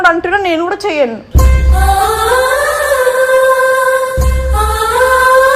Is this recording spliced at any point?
no; 0 cuts

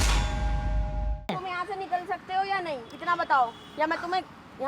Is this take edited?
yes; 1 cut; at 1.3 s

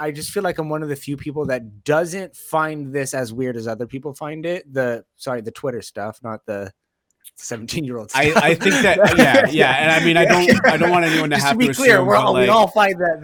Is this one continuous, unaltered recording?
yes; 0 cuts

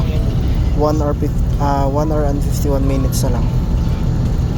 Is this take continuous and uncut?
yes; 0 cuts

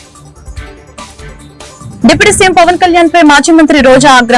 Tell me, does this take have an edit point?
yes; 1 cut; at 1.0 s

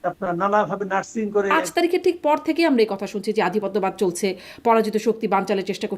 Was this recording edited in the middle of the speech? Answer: yes; 1 cut; at 1.6 s

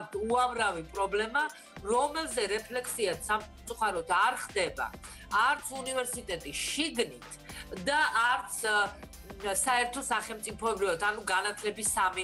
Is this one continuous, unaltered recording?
yes; 0 cuts

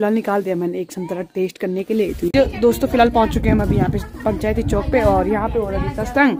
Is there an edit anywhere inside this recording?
yes; 1 cut; at 2.3 s

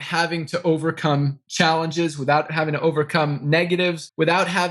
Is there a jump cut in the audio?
yes; 1 cut; at 2.5 s

